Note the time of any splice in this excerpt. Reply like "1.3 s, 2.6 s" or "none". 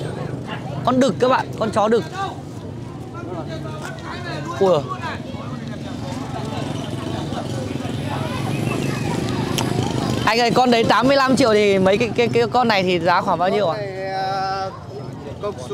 none